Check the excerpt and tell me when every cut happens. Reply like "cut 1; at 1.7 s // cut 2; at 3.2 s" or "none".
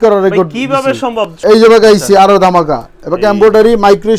cut 1; at 1.4 s